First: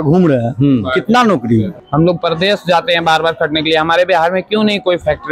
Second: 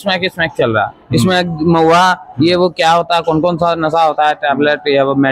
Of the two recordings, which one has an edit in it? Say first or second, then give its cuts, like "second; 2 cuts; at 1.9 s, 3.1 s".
first; 1 cut; at 1.7 s